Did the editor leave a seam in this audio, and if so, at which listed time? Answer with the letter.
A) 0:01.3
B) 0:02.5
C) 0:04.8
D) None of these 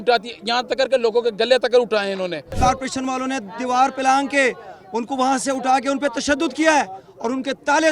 B